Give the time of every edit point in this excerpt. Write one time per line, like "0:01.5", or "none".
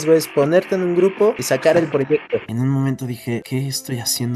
0:02.4
0:03.4